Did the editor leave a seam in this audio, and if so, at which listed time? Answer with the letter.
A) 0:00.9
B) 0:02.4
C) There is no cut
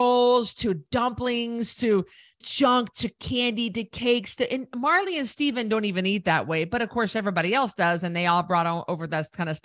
B